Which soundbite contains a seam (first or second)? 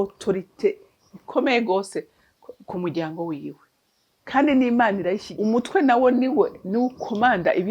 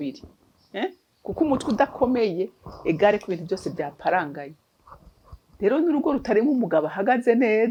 first